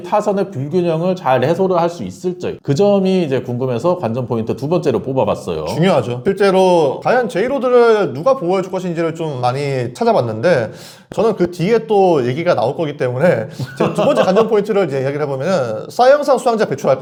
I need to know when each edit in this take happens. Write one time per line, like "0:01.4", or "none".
none